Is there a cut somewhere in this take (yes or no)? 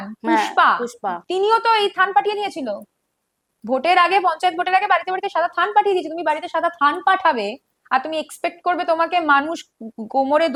no